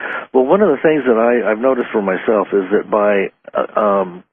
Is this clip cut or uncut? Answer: uncut